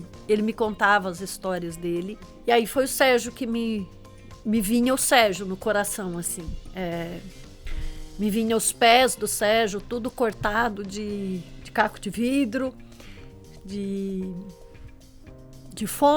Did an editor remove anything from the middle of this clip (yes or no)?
yes